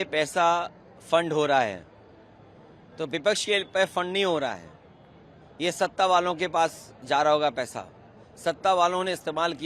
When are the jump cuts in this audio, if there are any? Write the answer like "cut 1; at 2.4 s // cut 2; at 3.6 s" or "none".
none